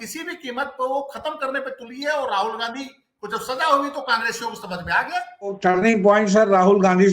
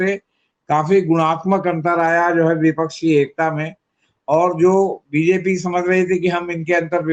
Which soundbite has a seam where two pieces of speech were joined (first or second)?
first